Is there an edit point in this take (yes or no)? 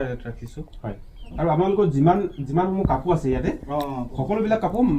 yes